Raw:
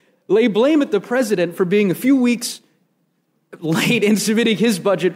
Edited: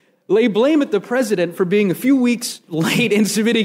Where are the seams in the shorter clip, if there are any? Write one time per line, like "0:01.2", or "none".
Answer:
0:02.6